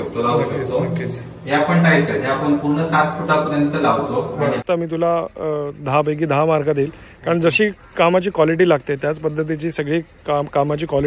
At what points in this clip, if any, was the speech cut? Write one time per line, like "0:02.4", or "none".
0:04.6